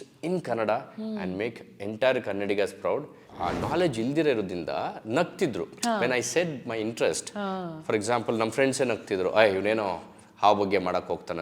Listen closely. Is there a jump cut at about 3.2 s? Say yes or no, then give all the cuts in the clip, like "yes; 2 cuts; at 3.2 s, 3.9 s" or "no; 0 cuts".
yes; 1 cut; at 3.2 s